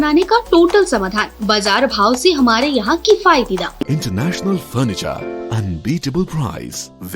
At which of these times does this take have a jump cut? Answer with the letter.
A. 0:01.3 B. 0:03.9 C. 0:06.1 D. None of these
B